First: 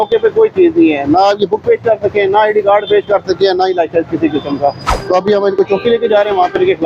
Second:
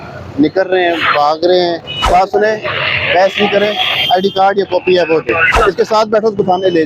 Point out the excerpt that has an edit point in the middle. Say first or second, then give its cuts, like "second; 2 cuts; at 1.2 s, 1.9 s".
second; 2 cuts; at 2.1 s, 5.5 s